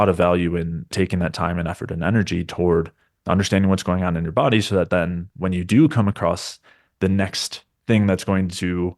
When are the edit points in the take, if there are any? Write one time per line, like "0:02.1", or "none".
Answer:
0:00.9